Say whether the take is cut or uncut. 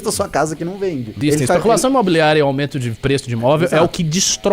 cut